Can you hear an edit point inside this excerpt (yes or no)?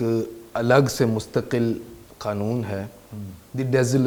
no